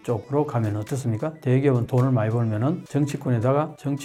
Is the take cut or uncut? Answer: uncut